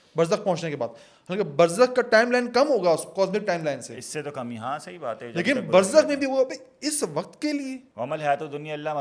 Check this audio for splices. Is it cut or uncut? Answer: cut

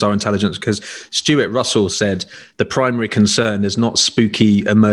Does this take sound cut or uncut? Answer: uncut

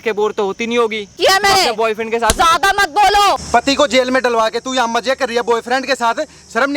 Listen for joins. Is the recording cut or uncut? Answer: cut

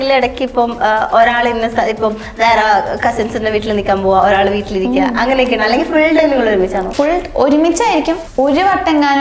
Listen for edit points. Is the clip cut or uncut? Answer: cut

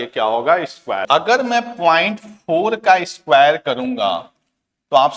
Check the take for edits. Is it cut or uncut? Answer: cut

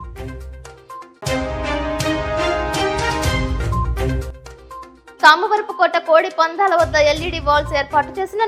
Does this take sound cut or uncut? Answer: uncut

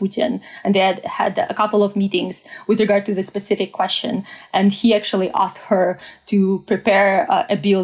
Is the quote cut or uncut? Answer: uncut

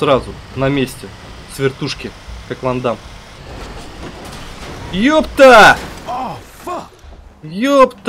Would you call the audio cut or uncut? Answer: cut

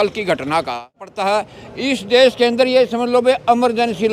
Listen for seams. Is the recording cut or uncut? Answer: cut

